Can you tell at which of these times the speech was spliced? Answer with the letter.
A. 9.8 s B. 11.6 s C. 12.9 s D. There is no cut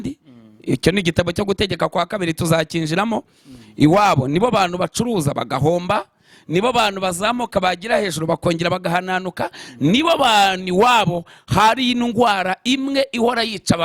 D